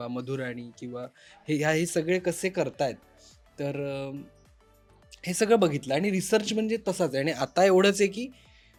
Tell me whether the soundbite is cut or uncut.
uncut